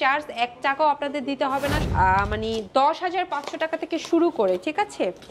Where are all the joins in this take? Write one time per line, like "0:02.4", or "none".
0:01.8